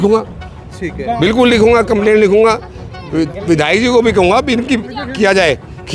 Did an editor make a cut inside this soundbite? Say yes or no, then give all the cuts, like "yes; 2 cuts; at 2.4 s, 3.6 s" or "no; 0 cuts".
no; 0 cuts